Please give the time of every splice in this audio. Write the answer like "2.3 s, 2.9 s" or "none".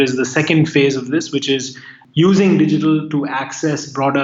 1.9 s